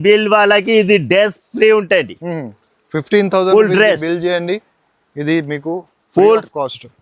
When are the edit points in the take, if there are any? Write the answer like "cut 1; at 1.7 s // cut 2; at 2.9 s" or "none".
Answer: none

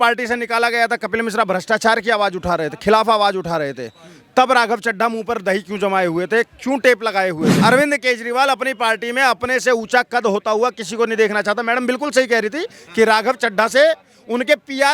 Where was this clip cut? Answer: cut 1; at 7.5 s

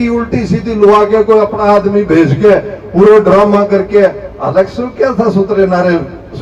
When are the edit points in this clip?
none

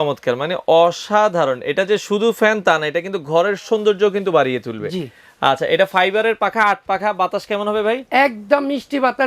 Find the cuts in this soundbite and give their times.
none

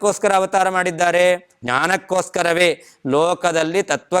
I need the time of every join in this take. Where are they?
cut 1; at 1.5 s

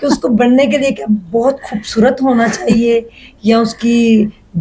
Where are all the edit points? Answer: none

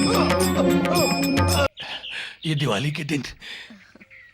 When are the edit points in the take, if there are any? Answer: cut 1; at 1.7 s

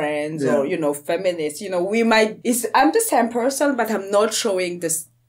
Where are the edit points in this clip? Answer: cut 1; at 2.4 s

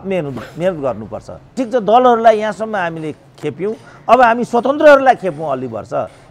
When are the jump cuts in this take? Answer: cut 1; at 1.5 s

